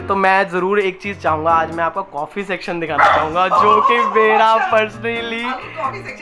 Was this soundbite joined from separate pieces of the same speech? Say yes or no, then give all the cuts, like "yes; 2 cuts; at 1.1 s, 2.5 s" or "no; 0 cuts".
no; 0 cuts